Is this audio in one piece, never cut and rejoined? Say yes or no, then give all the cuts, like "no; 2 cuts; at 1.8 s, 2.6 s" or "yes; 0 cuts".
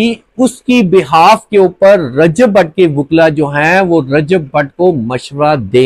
yes; 0 cuts